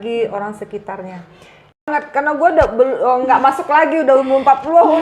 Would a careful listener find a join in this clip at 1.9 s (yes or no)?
yes